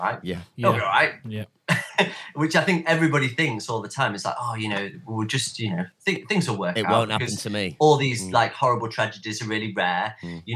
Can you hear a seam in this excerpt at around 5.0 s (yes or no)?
no